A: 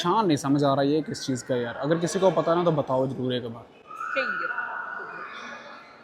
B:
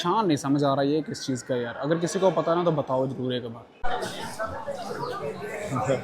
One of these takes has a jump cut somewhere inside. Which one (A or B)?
B